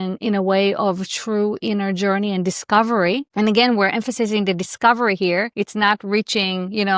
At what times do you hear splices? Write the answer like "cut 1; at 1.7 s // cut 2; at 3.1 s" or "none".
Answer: cut 1; at 3.3 s // cut 2; at 5.5 s

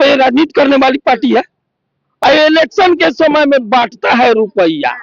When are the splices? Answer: cut 1; at 2.0 s

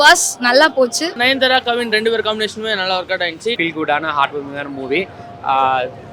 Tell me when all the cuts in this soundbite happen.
cut 1; at 1.2 s // cut 2; at 3.6 s

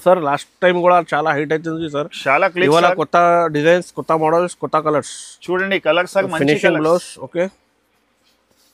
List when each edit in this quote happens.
none

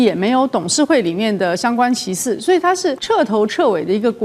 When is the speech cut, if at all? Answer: cut 1; at 3.0 s

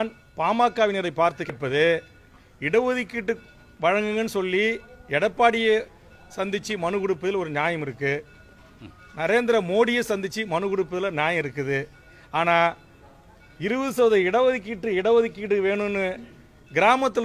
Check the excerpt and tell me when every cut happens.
cut 1; at 1.5 s

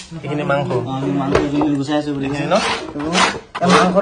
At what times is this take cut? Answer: none

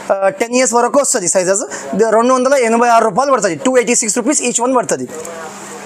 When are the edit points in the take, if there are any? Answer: none

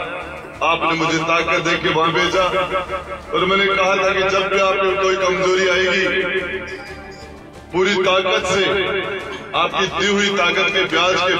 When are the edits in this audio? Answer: none

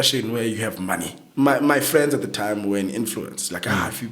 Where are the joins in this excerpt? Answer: cut 1; at 1.2 s

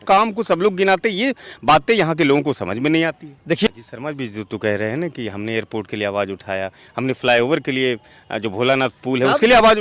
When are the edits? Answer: cut 1; at 3.7 s

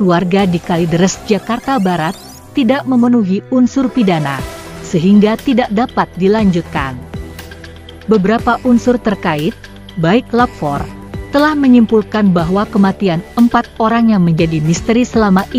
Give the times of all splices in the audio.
none

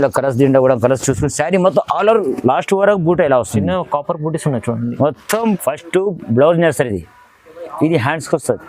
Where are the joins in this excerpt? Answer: cut 1; at 5.6 s

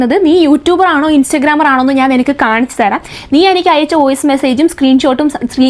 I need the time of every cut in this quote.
none

